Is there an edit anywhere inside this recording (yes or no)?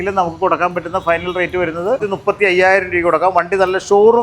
yes